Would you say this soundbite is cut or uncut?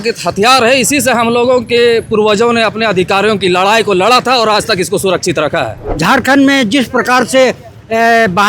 cut